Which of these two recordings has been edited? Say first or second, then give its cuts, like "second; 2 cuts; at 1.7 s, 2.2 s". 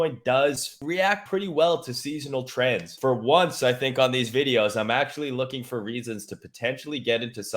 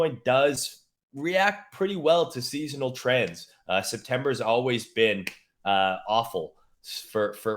first; 2 cuts; at 1.1 s, 2.9 s